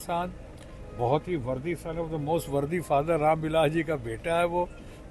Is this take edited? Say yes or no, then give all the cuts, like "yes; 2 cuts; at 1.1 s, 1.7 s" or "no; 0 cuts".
no; 0 cuts